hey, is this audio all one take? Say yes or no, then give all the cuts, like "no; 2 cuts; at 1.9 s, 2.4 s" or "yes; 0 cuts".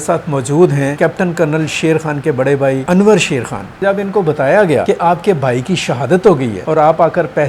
no; 5 cuts; at 0.9 s, 2.8 s, 3.8 s, 4.8 s, 6.5 s